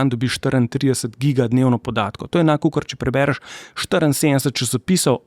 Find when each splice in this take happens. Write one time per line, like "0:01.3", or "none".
none

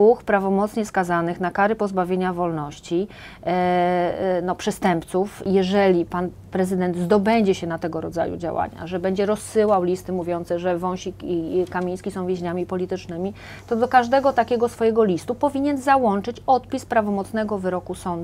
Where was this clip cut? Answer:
0:05.5

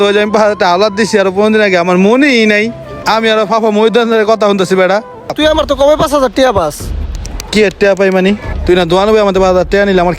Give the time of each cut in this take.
0:05.3

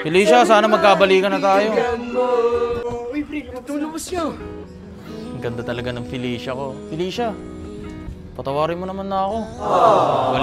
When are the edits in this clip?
none

